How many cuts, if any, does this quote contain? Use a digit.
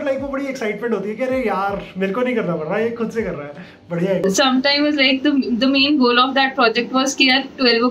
1